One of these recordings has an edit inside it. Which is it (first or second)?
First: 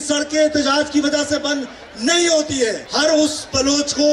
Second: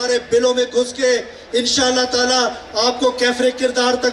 first